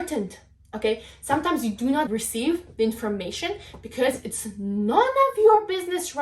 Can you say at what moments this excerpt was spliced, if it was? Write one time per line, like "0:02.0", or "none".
0:02.1